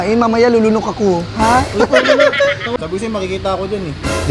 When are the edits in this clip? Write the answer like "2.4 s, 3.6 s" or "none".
2.8 s